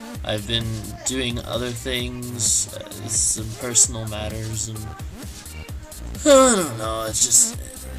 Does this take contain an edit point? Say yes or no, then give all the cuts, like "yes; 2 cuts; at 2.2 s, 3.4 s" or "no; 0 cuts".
no; 0 cuts